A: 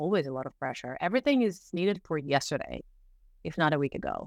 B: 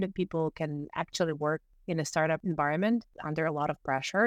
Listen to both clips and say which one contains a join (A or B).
B